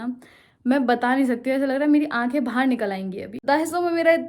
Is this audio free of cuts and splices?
no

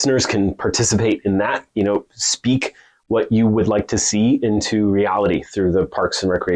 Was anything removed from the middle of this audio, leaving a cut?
no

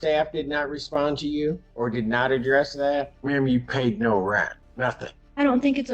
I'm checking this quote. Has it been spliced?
yes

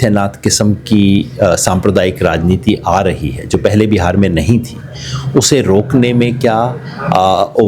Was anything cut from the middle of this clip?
no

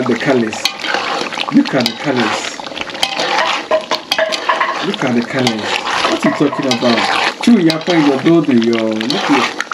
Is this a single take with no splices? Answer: yes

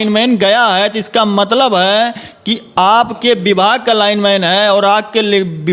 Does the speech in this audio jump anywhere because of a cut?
no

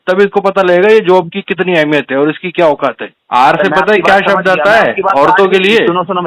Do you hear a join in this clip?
yes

